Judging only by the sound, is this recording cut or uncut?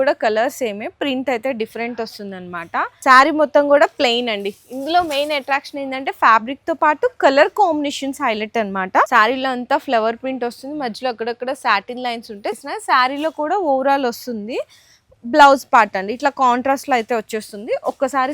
cut